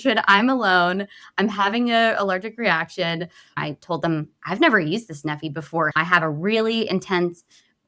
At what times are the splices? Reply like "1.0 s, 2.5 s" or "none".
3.6 s, 6.0 s